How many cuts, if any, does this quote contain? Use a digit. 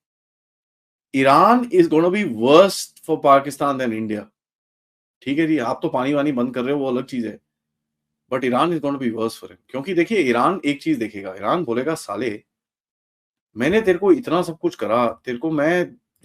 0